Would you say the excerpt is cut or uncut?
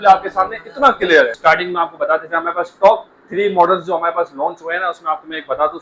cut